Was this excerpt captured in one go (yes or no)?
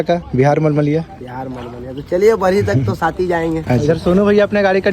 no